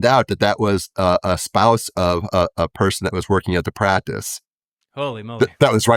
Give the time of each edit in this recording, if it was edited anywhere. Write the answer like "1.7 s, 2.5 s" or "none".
none